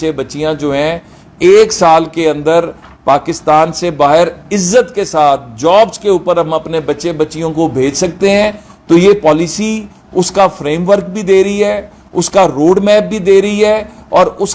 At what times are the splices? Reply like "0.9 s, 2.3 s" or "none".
none